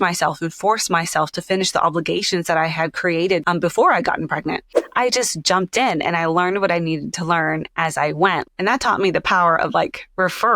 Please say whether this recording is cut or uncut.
cut